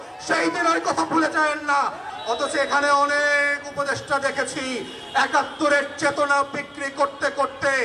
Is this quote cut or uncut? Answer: cut